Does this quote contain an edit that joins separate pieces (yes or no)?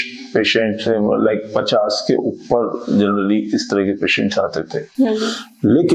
no